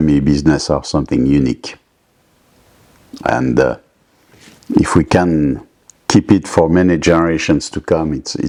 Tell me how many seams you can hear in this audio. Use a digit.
0